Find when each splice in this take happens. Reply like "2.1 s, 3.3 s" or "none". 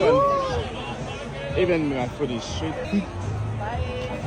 2.8 s